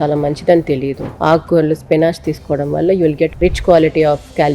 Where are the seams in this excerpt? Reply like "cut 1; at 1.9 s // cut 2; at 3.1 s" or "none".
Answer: cut 1; at 1.0 s // cut 2; at 3.4 s

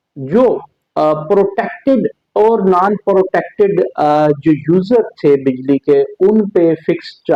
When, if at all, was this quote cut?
none

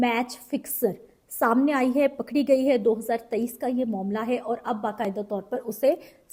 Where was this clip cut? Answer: none

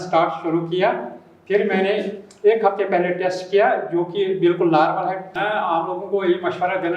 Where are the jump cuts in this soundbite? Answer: cut 1; at 5.3 s

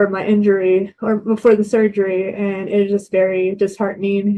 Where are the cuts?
none

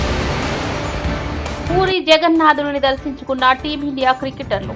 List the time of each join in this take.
cut 1; at 1.6 s

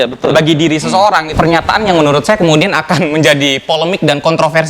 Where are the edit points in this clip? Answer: cut 1; at 1.3 s

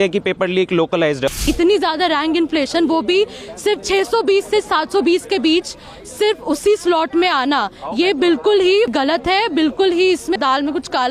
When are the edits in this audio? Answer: cut 1; at 1.4 s // cut 2; at 8.9 s // cut 3; at 10.4 s

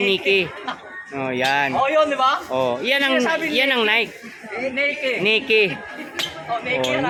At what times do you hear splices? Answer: none

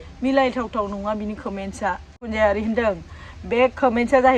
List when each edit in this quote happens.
cut 1; at 2.3 s

